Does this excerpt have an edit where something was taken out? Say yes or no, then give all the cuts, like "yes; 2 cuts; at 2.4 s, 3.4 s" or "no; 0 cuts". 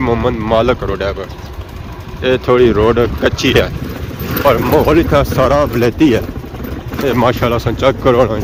no; 0 cuts